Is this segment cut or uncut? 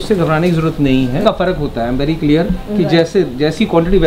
cut